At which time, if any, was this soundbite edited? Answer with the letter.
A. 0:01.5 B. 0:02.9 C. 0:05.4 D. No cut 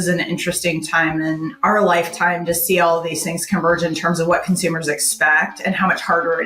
A